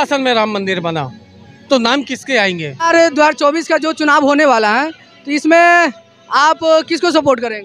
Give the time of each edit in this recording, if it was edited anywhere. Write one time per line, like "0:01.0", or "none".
none